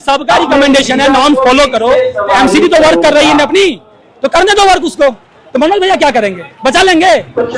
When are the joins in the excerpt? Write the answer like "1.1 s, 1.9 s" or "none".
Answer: none